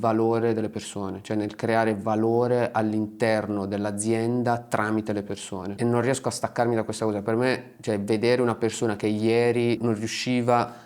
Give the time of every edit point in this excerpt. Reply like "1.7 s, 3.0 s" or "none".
5.6 s, 9.8 s